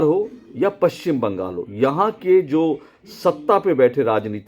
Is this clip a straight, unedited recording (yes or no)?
yes